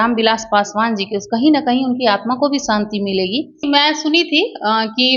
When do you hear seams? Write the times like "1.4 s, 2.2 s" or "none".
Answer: 3.6 s